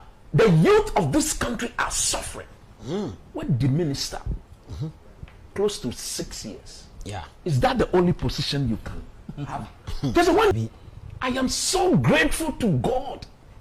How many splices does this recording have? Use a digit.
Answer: 1